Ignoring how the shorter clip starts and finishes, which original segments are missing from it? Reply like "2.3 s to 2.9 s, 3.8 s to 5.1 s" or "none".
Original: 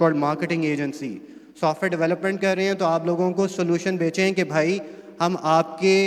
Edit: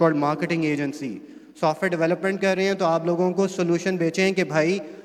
none